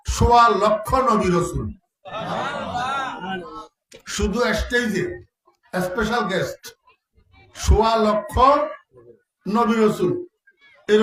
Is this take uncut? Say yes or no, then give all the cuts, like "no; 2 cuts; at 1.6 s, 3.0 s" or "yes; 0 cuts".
yes; 0 cuts